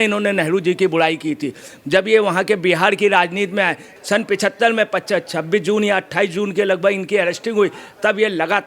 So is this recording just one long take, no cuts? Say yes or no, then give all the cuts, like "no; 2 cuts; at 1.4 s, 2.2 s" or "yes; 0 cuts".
no; 1 cut; at 3.9 s